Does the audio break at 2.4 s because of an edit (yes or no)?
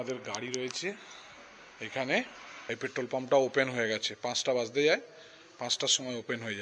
yes